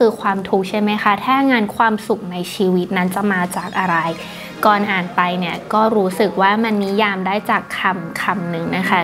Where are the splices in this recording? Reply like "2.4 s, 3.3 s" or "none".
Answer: none

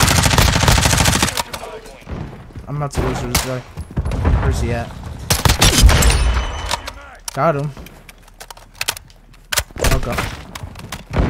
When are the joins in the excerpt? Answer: 10.1 s

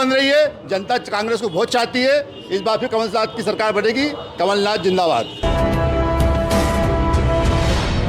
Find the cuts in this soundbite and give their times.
5.4 s

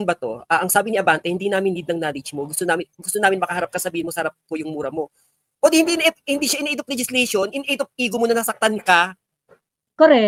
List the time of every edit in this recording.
none

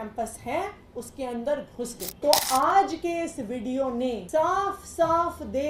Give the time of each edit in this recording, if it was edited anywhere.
2.0 s, 4.2 s

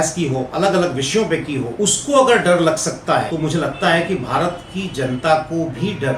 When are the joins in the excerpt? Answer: 1.7 s, 3.3 s

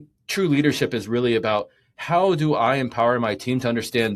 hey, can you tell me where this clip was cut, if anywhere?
none

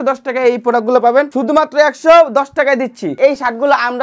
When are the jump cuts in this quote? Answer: 1.3 s, 3.0 s

